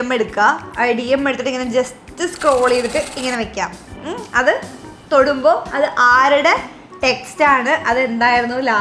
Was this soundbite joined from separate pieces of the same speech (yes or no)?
no